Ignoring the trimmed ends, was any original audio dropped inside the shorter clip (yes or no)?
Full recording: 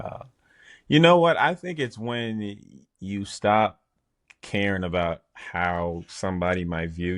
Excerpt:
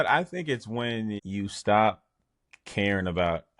yes